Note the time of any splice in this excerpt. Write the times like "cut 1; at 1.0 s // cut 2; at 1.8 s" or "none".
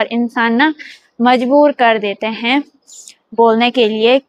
none